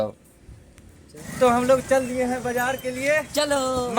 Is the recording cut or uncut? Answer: cut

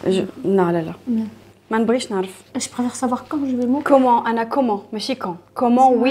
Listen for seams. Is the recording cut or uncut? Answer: uncut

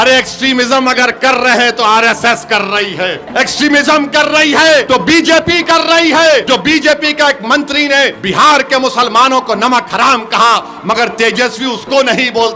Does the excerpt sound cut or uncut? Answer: cut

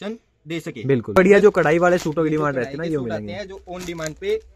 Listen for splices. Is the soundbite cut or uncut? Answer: cut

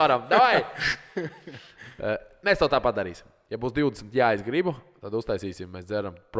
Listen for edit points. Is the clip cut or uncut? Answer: uncut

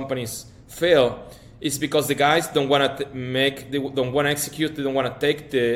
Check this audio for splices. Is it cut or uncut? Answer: uncut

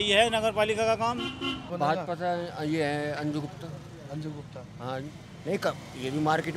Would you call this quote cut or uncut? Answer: cut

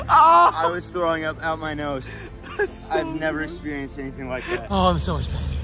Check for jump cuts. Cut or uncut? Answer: cut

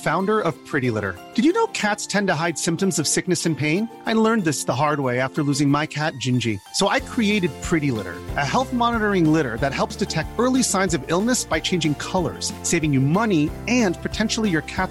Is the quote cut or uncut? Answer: uncut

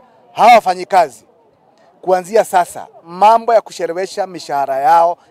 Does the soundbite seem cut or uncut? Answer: uncut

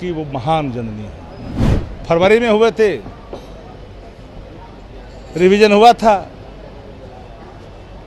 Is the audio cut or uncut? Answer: cut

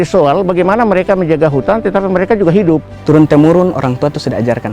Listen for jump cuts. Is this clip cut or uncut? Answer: cut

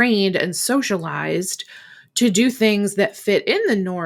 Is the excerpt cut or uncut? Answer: uncut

